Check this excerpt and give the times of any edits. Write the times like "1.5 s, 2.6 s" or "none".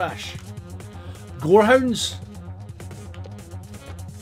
none